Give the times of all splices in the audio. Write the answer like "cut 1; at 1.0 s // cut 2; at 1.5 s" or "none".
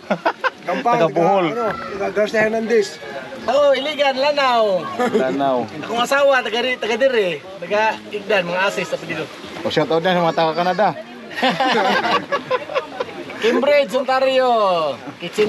cut 1; at 3.4 s // cut 2; at 9.4 s